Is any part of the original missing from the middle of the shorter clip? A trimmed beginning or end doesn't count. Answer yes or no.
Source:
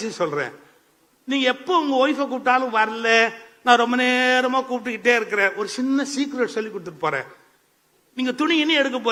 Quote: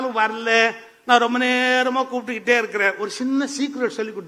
no